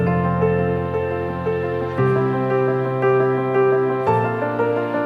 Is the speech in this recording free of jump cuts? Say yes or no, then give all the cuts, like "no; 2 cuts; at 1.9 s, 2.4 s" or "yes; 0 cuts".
yes; 0 cuts